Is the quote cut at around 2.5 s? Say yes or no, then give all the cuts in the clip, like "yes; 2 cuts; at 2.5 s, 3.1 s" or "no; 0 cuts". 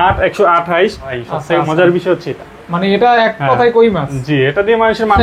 no; 1 cut; at 1.2 s